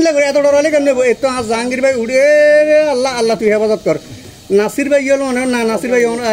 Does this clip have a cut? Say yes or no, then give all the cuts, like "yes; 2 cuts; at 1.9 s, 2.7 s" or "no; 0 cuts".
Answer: yes; 1 cut; at 4.2 s